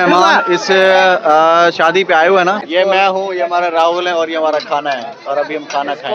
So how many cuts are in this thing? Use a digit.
1